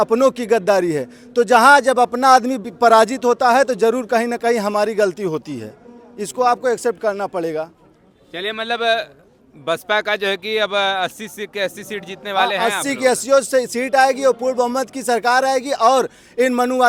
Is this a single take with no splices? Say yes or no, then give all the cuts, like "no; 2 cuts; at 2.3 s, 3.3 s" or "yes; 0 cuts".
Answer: yes; 0 cuts